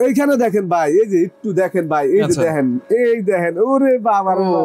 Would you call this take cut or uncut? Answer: uncut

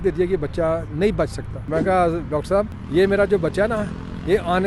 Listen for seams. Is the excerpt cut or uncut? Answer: cut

